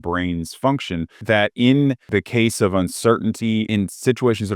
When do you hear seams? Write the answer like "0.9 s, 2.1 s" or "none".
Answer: 1.2 s, 2.1 s, 3.7 s